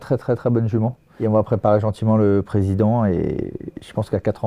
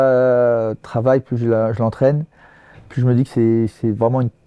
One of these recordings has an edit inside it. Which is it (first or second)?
first